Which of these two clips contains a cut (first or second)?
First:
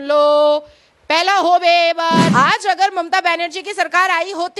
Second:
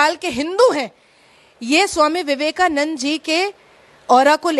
first